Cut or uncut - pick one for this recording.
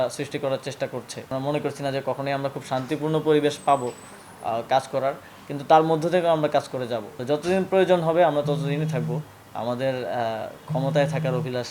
cut